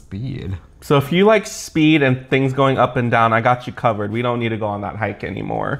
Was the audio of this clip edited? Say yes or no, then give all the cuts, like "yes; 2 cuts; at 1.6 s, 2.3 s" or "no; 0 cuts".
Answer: no; 0 cuts